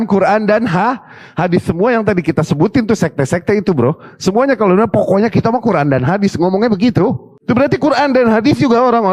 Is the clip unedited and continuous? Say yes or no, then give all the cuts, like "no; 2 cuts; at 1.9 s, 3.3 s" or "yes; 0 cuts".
yes; 0 cuts